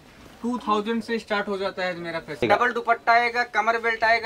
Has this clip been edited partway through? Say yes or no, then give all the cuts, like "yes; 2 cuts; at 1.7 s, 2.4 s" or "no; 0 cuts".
yes; 1 cut; at 2.4 s